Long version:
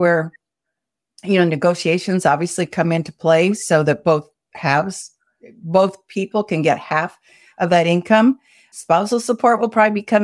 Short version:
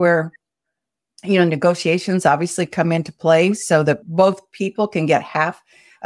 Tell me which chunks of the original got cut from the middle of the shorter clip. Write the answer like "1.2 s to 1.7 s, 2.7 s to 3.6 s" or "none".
4.0 s to 5.6 s